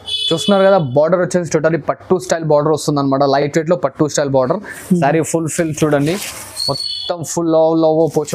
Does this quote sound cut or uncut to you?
uncut